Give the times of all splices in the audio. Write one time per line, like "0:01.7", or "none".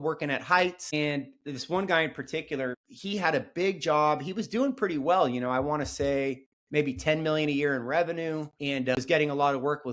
0:09.0